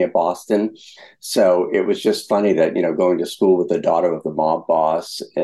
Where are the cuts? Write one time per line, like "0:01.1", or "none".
none